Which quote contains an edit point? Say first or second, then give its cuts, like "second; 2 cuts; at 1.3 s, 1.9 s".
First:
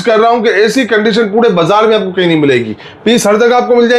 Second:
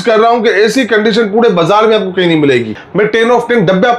second; 1 cut; at 2.8 s